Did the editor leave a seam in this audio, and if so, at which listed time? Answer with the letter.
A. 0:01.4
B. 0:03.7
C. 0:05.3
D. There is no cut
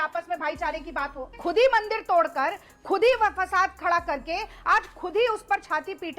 A